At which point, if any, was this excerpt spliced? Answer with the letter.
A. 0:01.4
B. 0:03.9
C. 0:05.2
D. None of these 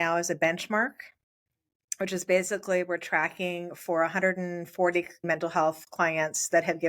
C